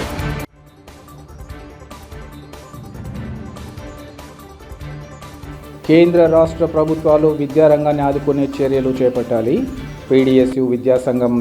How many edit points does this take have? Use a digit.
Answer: 1